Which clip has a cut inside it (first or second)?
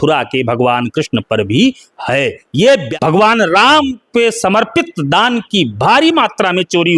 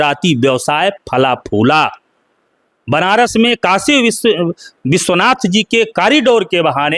first